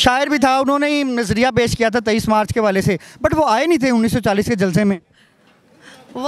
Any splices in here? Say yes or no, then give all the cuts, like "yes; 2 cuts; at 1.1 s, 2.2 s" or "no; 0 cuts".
no; 0 cuts